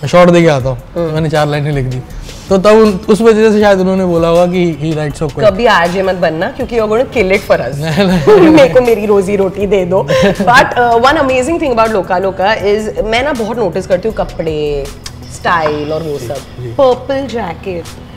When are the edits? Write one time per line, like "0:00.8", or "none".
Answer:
none